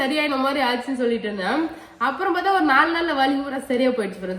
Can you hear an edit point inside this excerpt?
no; 0 cuts

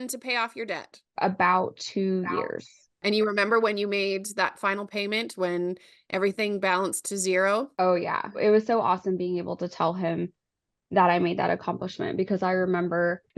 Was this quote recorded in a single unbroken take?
no; 2 cuts; at 1.0 s, 8.3 s

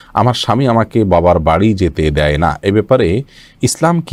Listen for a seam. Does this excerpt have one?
no; 0 cuts

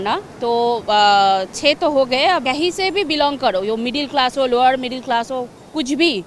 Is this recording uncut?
no; 1 cut; at 2.4 s

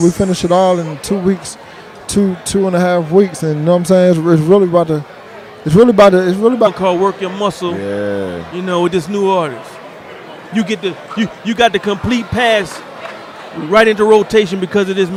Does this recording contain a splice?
no; 0 cuts

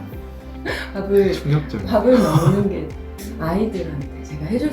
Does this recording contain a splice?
no; 0 cuts

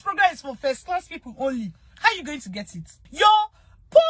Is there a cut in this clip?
yes; 1 cut; at 3.0 s

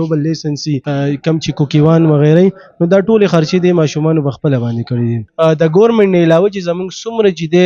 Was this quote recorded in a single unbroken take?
no; 2 cuts; at 0.8 s, 5.2 s

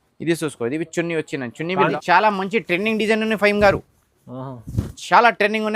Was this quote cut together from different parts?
yes; 1 cut; at 1.9 s

